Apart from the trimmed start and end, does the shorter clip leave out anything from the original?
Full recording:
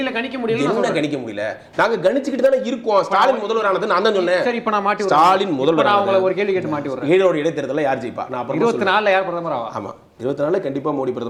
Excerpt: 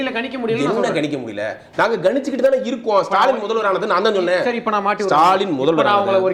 no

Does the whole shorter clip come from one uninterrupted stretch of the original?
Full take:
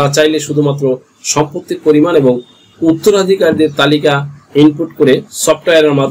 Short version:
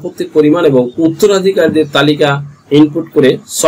no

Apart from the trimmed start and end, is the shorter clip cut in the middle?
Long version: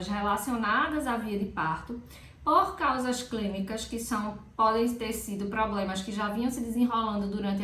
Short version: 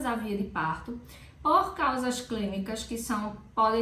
no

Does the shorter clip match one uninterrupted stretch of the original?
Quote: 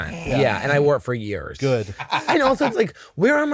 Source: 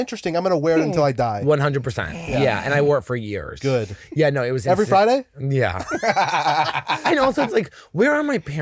no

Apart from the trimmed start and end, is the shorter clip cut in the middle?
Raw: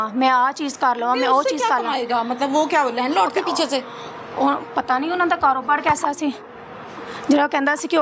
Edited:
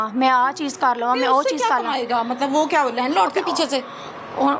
no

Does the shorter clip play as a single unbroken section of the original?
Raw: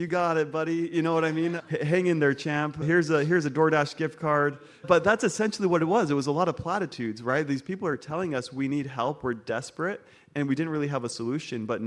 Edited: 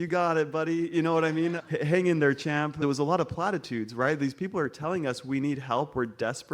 no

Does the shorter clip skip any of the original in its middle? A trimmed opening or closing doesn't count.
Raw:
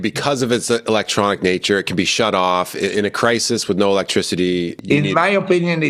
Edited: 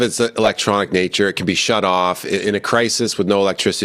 no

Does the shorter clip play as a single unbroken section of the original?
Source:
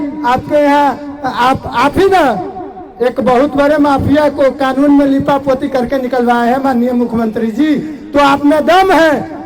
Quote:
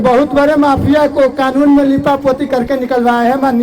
yes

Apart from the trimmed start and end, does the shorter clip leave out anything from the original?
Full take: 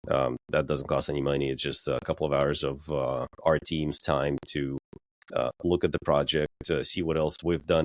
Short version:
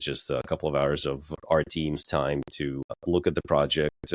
yes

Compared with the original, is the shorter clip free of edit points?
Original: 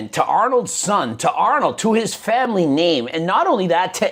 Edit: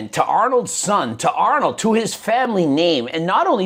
yes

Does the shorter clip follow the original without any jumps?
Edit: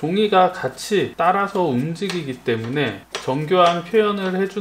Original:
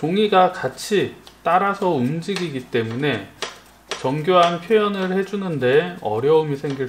no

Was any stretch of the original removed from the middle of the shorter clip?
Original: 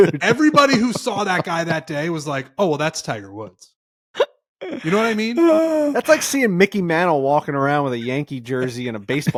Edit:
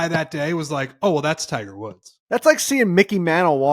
yes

